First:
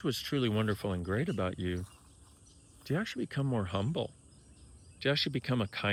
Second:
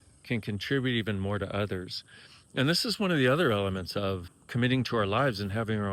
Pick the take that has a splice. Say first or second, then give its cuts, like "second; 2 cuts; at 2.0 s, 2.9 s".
second; 1 cut; at 4.3 s